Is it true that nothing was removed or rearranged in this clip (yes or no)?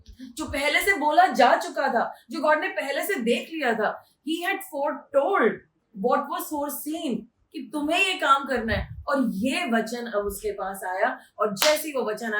yes